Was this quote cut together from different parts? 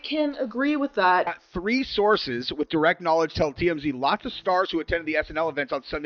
yes; 1 cut; at 1.4 s

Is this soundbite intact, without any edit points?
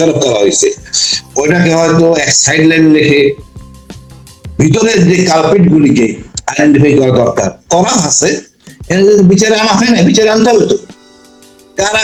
yes; 0 cuts

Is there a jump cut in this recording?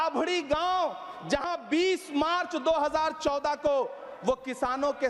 no; 0 cuts

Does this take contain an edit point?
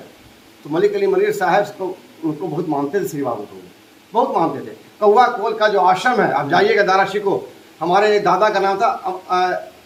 no; 0 cuts

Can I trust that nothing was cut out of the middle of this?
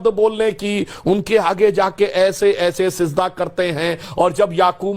yes; 0 cuts

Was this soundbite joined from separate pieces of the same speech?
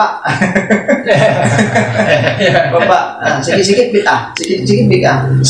no; 0 cuts

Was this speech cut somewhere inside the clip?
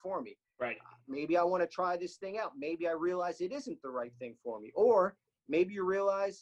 no; 0 cuts

